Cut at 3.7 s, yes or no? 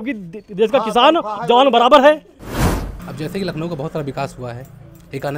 no